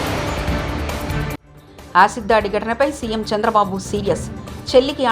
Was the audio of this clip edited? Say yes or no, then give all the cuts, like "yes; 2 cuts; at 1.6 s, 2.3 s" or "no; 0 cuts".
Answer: yes; 1 cut; at 1.4 s